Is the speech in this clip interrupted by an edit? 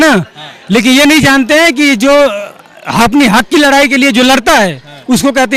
no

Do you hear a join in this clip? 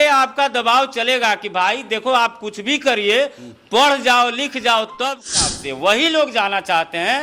yes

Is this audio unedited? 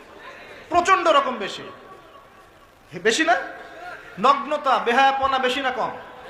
yes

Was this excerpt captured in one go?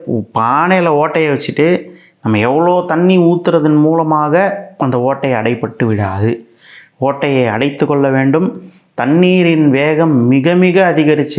yes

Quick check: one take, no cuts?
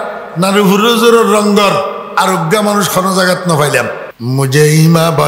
no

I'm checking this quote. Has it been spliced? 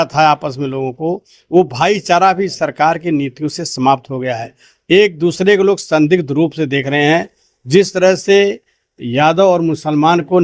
no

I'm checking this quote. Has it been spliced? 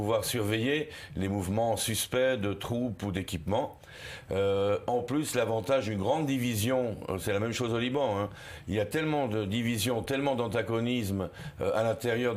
yes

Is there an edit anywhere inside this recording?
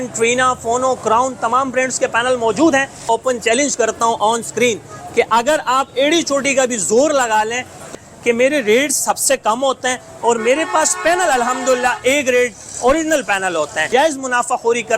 yes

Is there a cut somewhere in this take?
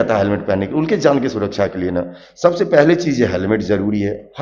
no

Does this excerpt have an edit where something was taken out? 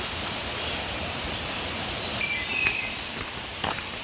yes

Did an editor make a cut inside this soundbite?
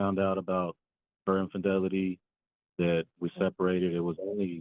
no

